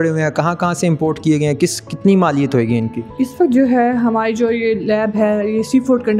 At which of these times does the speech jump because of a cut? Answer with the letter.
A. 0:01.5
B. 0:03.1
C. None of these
B